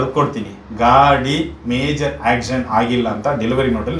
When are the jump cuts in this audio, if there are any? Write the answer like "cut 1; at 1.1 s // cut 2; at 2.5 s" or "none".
none